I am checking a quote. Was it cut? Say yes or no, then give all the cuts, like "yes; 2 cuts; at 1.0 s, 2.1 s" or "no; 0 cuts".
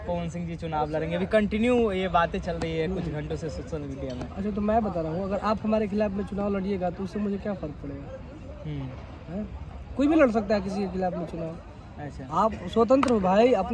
no; 0 cuts